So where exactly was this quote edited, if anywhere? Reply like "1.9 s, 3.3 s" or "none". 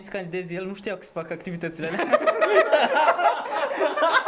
none